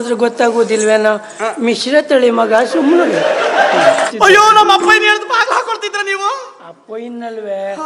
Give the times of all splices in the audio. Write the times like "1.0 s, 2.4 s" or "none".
4.1 s